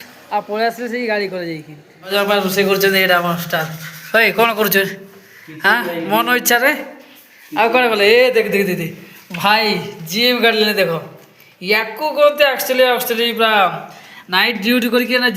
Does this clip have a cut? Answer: yes; 1 cut; at 2.1 s

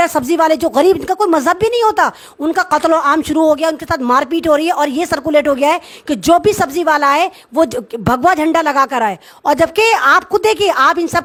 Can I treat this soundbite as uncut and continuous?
yes; 0 cuts

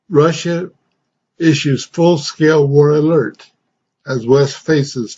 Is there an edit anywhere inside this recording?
yes; 1 cut; at 4.0 s

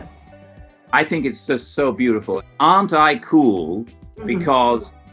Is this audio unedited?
no; 1 cut; at 2.3 s

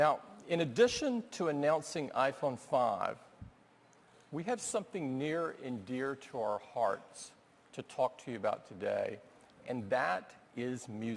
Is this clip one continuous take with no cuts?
no; 1 cut; at 5.2 s

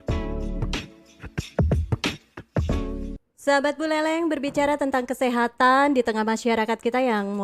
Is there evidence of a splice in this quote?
yes; 1 cut; at 3.2 s

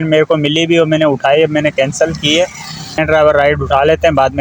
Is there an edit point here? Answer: yes; 1 cut; at 3.0 s

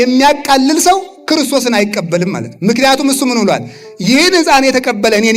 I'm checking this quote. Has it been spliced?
no; 0 cuts

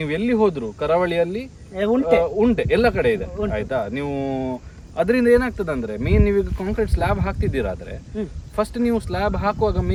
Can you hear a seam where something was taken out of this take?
no; 0 cuts

